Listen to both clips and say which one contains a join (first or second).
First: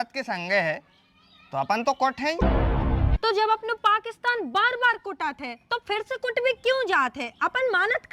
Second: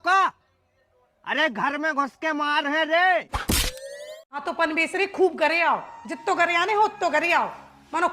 second